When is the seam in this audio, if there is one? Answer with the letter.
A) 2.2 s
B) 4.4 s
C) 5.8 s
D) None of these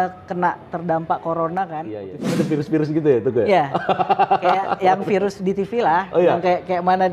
A